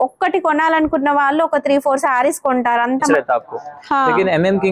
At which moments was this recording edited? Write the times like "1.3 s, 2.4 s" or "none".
3.1 s

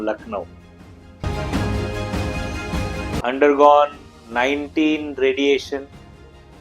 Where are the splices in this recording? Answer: 3.2 s

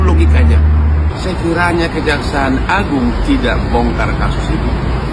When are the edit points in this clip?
1.1 s

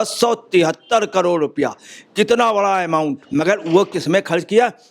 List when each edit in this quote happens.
3.2 s

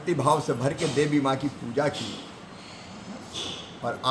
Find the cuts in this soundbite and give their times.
none

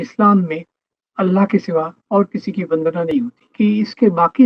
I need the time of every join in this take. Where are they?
3.4 s

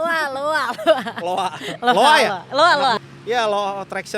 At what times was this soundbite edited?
3.0 s

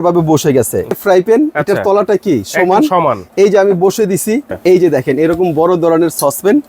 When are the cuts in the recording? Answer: 1.0 s, 4.5 s

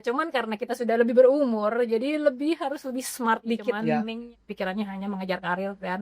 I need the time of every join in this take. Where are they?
3.9 s

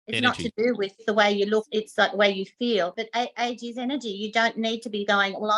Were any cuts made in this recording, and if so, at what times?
1.0 s, 1.7 s, 3.0 s

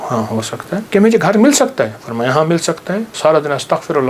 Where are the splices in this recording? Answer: 0.9 s, 3.1 s

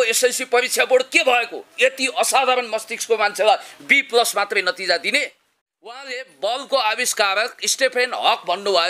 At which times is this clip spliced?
5.9 s

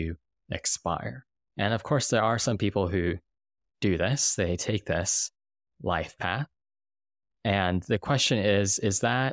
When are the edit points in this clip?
none

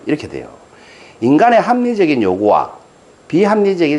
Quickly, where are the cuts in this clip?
none

